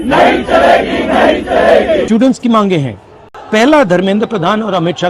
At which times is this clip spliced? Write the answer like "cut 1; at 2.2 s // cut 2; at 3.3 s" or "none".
cut 1; at 2.1 s